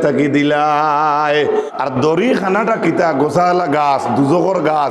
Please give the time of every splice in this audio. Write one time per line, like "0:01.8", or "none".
0:01.7

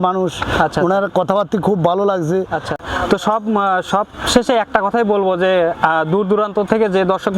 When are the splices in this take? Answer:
0:02.7

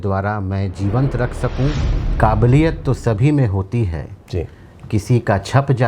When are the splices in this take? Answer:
0:01.9

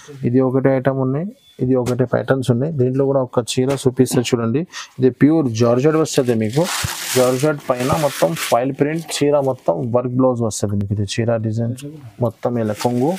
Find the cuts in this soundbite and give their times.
none

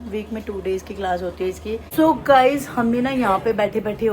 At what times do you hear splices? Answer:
0:01.9

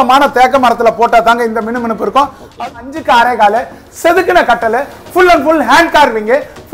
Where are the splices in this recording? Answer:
0:02.6

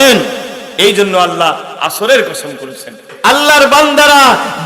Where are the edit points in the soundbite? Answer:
0:03.1

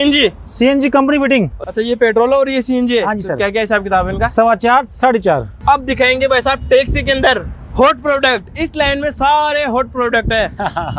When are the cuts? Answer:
0:01.6
0:05.6

